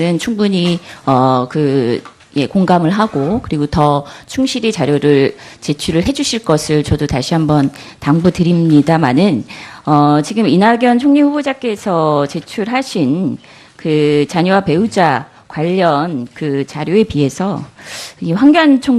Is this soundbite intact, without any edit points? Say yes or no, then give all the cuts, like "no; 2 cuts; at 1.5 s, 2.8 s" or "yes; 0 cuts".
no; 1 cut; at 1.7 s